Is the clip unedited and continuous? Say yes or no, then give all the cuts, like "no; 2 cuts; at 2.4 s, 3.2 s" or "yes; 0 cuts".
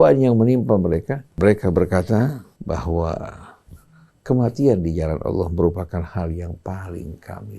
no; 2 cuts; at 1.3 s, 2.5 s